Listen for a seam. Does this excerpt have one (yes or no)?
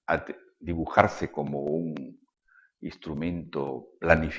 no